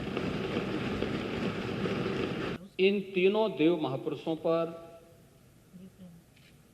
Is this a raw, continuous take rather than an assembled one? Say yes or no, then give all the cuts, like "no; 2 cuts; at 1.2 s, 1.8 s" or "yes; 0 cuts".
no; 1 cut; at 2.6 s